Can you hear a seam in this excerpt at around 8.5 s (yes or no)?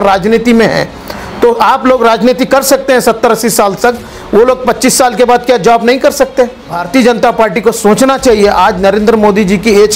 no